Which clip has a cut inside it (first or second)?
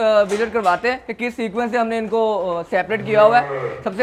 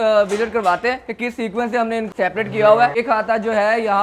second